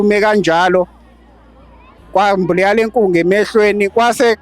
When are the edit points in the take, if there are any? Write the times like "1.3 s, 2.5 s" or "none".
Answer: none